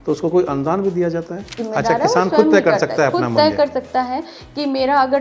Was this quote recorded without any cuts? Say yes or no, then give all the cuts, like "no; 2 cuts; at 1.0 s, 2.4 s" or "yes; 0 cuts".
no; 1 cut; at 1.6 s